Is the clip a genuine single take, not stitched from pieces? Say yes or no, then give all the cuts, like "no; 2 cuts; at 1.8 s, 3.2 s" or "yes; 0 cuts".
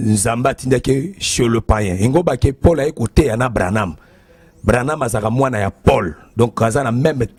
yes; 0 cuts